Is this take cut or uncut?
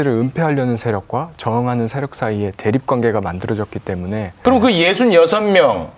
cut